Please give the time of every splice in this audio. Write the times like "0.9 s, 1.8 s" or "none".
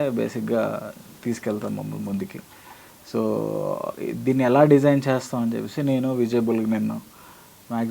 none